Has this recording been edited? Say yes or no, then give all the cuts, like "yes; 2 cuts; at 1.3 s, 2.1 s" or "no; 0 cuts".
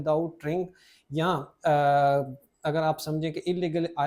no; 0 cuts